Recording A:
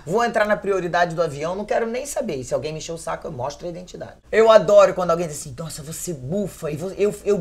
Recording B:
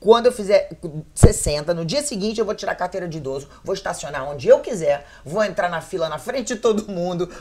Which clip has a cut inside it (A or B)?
A